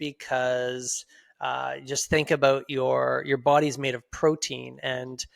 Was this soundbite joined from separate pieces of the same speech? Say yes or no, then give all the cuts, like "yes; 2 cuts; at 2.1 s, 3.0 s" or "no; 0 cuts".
no; 0 cuts